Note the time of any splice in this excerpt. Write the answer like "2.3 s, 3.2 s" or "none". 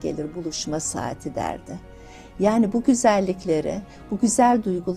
none